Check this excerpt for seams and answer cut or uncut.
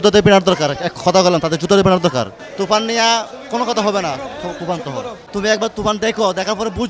uncut